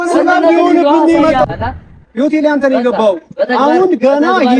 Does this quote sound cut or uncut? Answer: cut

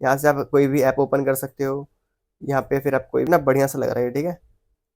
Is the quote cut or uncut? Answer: cut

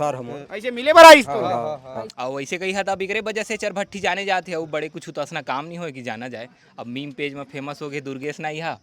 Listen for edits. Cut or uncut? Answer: cut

